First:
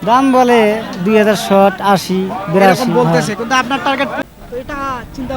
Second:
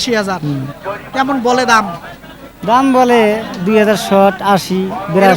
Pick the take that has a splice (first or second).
first